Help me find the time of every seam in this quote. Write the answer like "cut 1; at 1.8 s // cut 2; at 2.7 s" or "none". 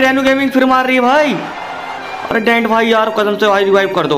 none